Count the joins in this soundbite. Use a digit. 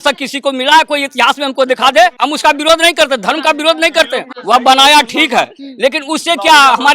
2